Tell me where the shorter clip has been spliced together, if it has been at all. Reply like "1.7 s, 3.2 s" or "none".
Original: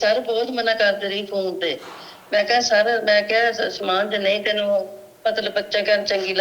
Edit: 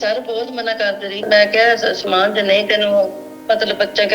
1.3 s